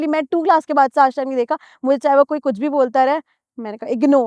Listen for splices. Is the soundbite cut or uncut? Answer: uncut